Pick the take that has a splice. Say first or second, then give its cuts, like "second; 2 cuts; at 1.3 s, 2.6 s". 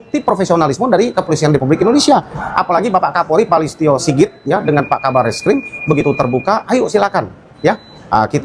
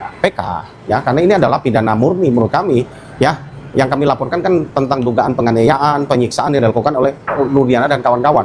first; 1 cut; at 5.0 s